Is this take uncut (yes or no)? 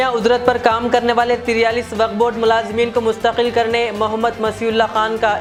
yes